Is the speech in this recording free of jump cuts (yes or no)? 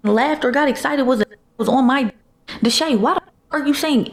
yes